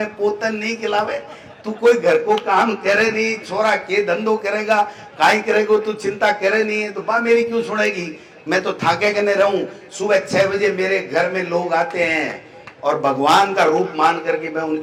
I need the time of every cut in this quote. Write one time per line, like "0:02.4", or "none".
none